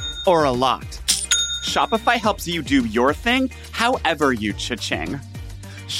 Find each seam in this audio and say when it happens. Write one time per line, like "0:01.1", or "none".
none